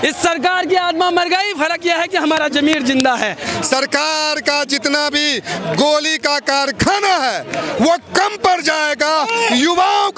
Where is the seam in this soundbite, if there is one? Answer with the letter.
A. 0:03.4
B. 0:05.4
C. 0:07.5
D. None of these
A